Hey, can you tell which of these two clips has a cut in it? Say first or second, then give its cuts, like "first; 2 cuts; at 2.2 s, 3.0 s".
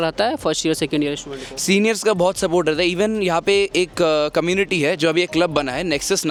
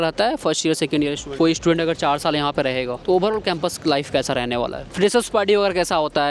second; 3 cuts; at 1.3 s, 2.9 s, 4.8 s